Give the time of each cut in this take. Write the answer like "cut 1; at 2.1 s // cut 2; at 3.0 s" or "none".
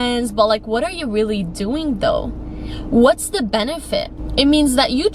cut 1; at 4.2 s